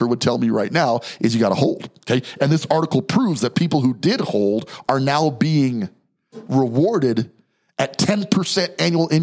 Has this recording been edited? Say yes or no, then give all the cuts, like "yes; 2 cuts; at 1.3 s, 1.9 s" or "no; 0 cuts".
no; 0 cuts